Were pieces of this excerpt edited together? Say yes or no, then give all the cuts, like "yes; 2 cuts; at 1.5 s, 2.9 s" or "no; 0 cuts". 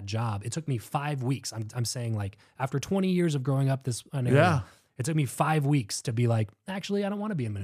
no; 0 cuts